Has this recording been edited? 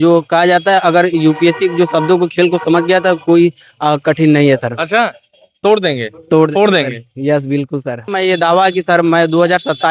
yes; 1 cut; at 8.1 s

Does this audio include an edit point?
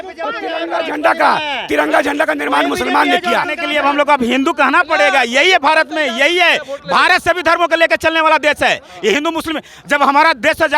yes; 1 cut; at 3.6 s

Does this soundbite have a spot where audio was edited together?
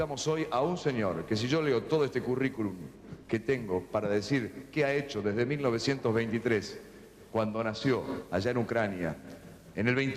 yes; 1 cut; at 1.9 s

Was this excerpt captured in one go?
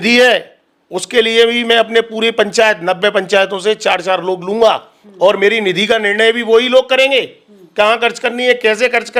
yes; 0 cuts

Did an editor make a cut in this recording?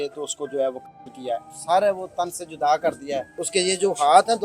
yes; 2 cuts; at 1.5 s, 3.3 s

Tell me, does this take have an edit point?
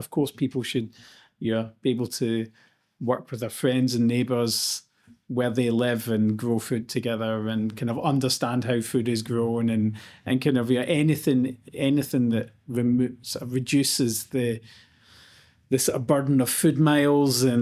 no; 0 cuts

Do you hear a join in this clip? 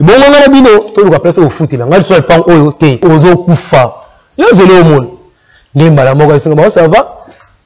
yes; 1 cut; at 3.0 s

